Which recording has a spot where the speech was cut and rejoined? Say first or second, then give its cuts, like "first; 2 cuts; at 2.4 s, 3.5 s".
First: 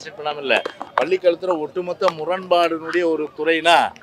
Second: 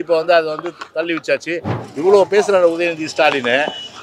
second; 1 cut; at 1.8 s